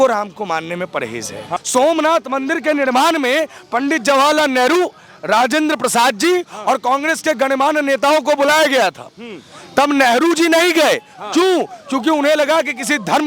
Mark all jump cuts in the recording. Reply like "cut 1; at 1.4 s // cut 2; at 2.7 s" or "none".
cut 1; at 1.4 s